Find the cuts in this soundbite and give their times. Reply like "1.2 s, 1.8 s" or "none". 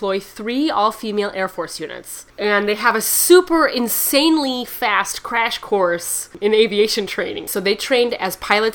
2.2 s, 6.3 s, 7.4 s